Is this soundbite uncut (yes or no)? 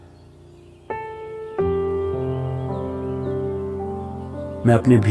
yes